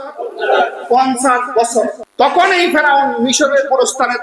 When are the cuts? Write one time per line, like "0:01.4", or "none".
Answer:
0:02.0